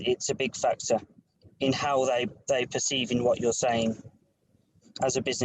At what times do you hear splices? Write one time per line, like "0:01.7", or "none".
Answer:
0:01.2